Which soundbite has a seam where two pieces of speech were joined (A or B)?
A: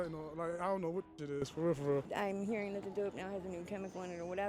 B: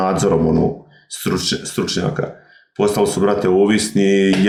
A